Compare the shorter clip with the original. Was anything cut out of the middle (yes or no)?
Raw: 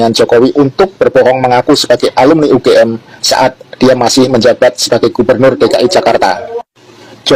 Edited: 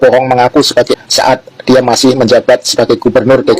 yes